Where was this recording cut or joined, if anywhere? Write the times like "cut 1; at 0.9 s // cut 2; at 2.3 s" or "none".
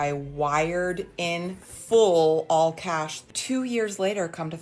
cut 1; at 3.2 s